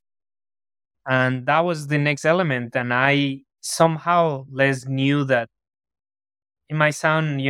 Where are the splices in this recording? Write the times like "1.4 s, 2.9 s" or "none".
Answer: none